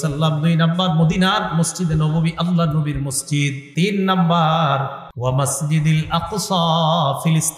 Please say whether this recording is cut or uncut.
cut